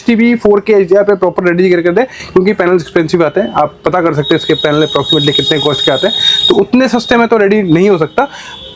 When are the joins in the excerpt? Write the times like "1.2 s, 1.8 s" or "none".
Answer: none